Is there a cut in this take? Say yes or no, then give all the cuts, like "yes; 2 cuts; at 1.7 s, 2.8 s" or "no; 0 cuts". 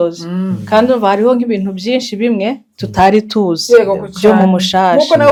no; 0 cuts